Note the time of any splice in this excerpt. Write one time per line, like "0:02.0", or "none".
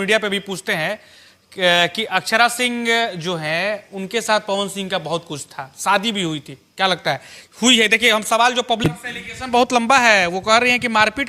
0:08.9